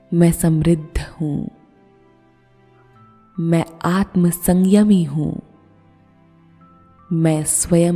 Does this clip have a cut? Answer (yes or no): yes